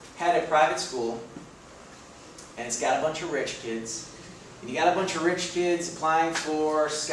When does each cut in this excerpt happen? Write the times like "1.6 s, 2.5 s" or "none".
5.9 s